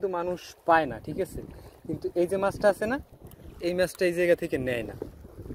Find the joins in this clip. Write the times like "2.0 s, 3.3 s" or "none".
none